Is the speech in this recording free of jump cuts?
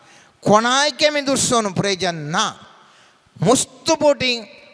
yes; 0 cuts

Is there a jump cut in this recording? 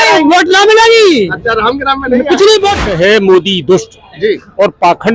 yes; 1 cut; at 2.8 s

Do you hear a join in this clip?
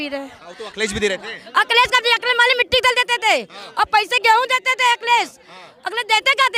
no; 0 cuts

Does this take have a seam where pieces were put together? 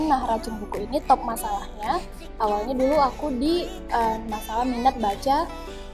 no; 0 cuts

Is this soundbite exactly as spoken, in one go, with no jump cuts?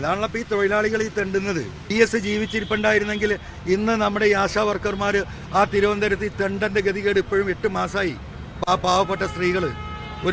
no; 1 cut; at 1.9 s

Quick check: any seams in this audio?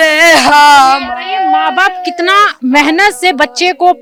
no; 0 cuts

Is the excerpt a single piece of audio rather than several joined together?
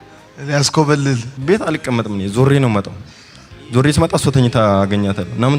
no; 1 cut; at 1.3 s

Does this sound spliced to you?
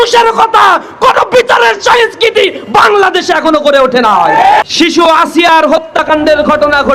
yes; 1 cut; at 4.6 s

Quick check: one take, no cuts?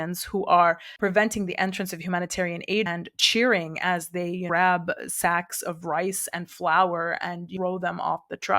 no; 3 cuts; at 2.9 s, 4.4 s, 7.5 s

